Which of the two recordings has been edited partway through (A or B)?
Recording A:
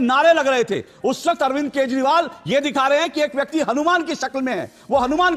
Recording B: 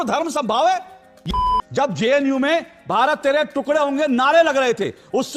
B